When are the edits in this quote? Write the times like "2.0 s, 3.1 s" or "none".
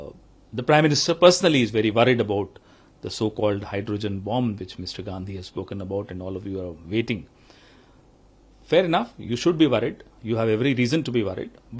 none